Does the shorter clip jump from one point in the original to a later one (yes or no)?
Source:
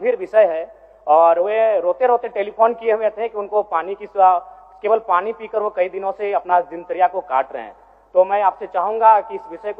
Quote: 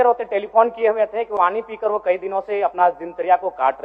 yes